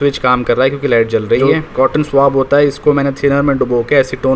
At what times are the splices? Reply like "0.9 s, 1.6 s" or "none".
1.4 s